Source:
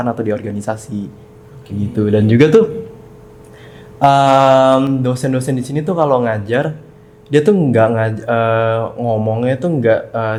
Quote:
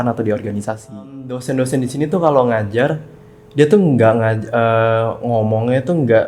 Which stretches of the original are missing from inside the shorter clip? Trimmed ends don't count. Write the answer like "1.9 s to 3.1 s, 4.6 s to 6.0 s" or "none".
1.4 s to 5.1 s